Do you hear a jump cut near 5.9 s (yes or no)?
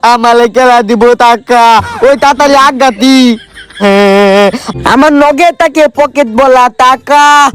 no